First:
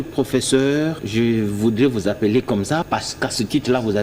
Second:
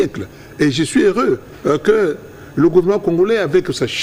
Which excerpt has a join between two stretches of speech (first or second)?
first